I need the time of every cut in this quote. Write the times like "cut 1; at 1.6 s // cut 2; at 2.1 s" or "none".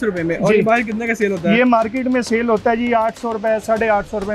none